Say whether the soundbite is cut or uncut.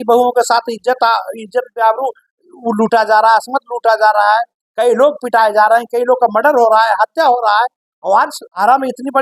uncut